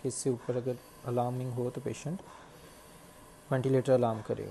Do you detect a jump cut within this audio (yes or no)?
no